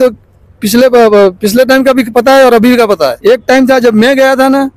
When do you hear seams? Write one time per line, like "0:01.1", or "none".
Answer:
0:03.2